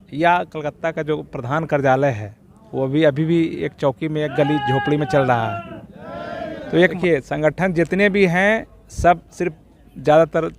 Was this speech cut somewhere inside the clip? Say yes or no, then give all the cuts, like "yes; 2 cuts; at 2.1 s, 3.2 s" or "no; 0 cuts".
yes; 1 cut; at 7.0 s